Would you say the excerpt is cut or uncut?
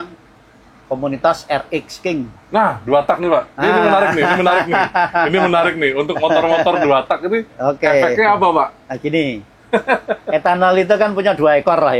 uncut